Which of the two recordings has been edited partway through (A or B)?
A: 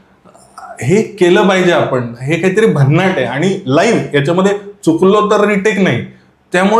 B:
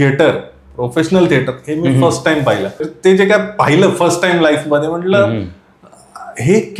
B